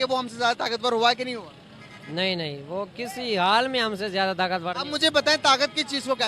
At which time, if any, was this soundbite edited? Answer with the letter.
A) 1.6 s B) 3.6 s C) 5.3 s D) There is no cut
D